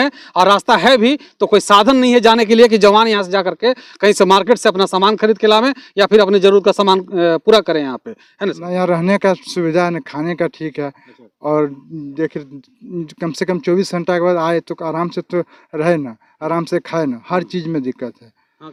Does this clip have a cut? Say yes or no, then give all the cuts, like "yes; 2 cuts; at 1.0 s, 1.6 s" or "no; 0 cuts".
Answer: no; 0 cuts